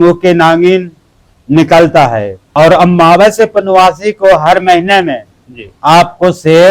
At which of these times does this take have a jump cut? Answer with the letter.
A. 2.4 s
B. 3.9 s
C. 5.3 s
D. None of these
A